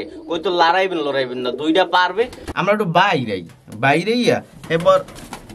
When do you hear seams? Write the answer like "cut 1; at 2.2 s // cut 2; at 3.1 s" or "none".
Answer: cut 1; at 2.4 s

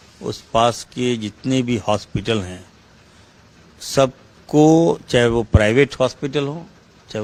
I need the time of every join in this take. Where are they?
none

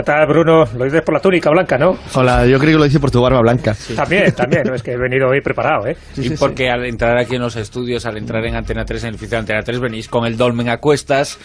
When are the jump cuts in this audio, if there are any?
cut 1; at 7.6 s

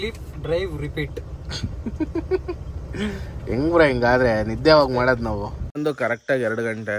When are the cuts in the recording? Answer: cut 1; at 5.8 s

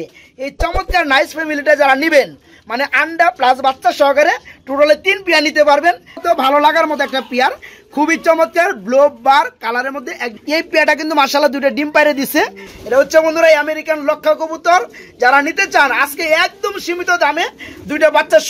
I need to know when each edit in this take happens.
cut 1; at 6.2 s // cut 2; at 10.3 s // cut 3; at 12.6 s

